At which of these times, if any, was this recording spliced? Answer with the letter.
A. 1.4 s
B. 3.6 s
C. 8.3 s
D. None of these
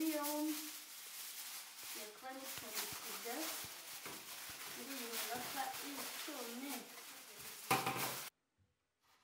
C